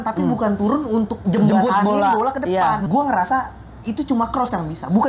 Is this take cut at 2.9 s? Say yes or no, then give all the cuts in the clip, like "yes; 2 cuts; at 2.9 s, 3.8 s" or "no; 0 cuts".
yes; 2 cuts; at 1.2 s, 2.9 s